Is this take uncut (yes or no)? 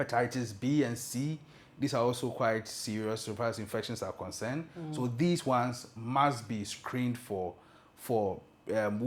yes